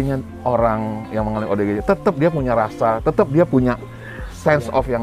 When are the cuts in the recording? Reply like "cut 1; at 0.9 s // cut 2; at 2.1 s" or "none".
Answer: none